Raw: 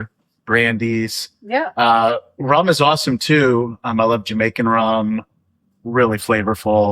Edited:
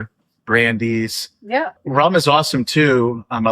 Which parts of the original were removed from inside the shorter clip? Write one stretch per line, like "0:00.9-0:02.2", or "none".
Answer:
0:01.7-0:02.2